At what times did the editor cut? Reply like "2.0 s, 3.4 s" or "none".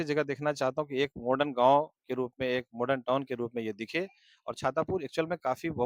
none